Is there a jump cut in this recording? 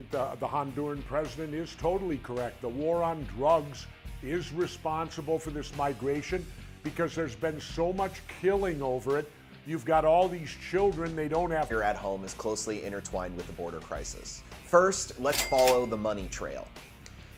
no; 0 cuts

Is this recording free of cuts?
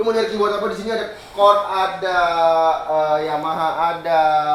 yes; 0 cuts

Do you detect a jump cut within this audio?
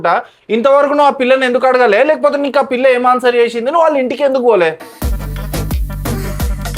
no; 0 cuts

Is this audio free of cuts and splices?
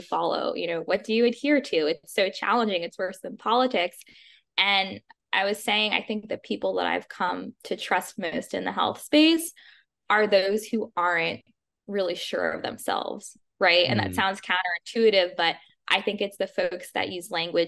yes; 0 cuts

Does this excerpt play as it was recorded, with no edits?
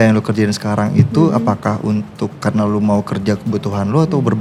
yes; 0 cuts

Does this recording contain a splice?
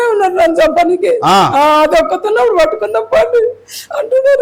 no; 0 cuts

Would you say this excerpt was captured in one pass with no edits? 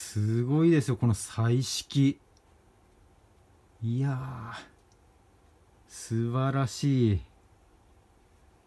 yes; 0 cuts

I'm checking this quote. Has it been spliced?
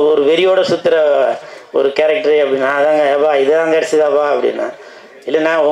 no; 0 cuts

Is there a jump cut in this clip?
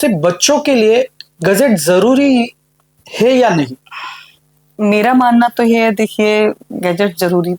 no; 0 cuts

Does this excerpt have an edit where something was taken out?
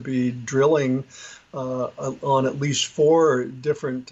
no; 0 cuts

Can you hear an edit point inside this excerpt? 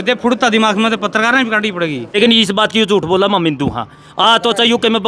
yes; 1 cut; at 2.0 s

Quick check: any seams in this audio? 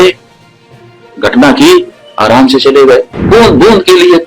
yes; 1 cut; at 3.2 s

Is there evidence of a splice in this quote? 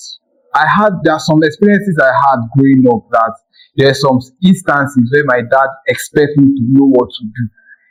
no; 0 cuts

